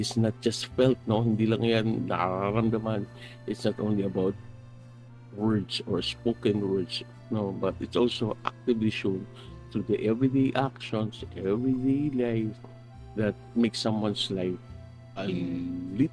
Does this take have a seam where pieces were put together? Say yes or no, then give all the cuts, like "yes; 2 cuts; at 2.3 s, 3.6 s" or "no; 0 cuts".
no; 0 cuts